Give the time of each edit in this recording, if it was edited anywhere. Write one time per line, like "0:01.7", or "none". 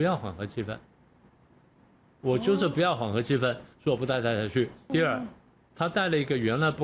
0:04.9